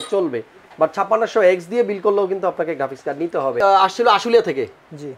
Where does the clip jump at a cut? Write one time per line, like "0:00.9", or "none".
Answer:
0:03.6